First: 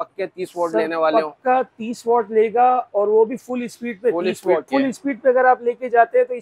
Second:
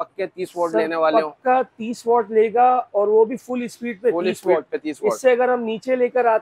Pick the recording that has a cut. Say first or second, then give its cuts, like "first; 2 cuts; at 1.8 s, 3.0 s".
first; 1 cut; at 4.6 s